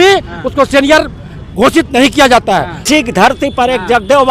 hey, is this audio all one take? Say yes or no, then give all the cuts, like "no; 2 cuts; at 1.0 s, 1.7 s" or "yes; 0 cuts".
no; 1 cut; at 2.8 s